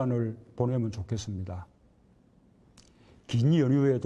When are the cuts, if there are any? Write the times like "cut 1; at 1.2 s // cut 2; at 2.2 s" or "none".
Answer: cut 1; at 3.1 s